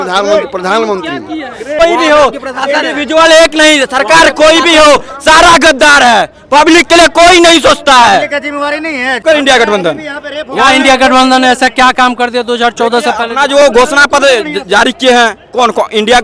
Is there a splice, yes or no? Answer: yes